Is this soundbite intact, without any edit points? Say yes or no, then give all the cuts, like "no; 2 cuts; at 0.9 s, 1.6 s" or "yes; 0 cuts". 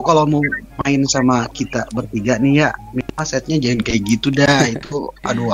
yes; 0 cuts